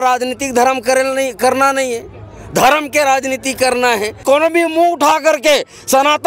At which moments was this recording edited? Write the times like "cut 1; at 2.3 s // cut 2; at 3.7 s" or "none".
cut 1; at 4.2 s